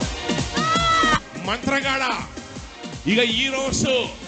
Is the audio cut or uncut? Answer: cut